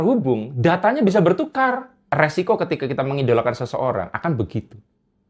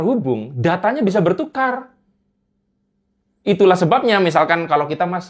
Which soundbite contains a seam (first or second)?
first